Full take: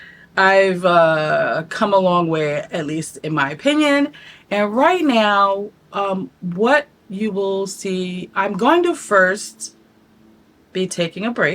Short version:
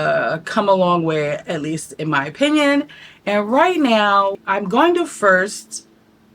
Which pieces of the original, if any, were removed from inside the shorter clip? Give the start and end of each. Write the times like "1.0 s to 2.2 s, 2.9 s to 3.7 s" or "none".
5.7 s to 8.3 s